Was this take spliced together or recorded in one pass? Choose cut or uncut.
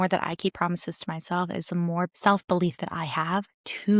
cut